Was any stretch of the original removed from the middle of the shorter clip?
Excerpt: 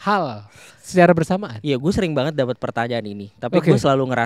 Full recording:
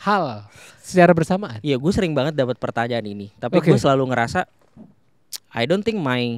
no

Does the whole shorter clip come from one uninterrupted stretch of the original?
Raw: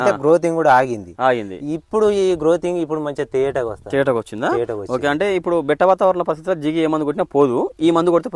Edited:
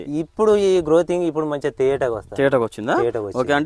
yes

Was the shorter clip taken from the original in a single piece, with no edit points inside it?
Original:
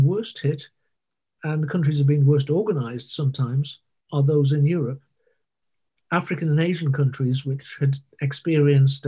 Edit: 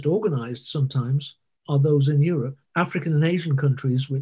no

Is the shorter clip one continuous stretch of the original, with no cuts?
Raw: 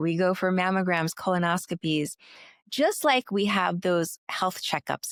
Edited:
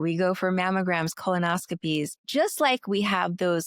no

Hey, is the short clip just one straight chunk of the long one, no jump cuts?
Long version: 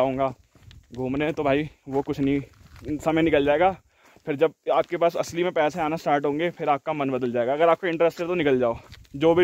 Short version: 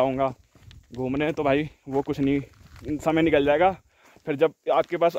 yes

